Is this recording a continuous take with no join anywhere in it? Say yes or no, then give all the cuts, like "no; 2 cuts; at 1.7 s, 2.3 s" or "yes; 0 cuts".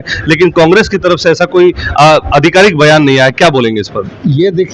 yes; 0 cuts